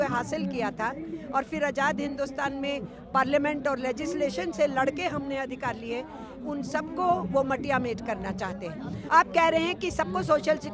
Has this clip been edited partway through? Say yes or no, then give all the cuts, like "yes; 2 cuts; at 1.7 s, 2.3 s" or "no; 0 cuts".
yes; 1 cut; at 9.0 s